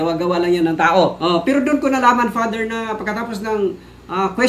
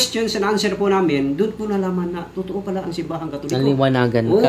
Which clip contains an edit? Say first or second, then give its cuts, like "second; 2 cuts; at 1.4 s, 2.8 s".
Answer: first; 1 cut; at 1.2 s